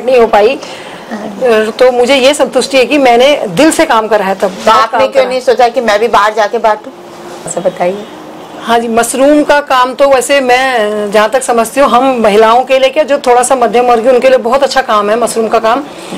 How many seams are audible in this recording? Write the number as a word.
one